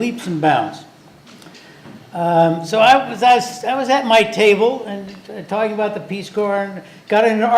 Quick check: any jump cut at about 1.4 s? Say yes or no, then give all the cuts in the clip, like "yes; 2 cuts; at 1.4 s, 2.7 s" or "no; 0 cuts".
no; 1 cut; at 2.7 s